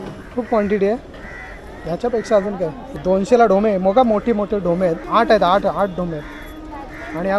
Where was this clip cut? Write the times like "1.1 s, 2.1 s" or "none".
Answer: 2.8 s, 5.0 s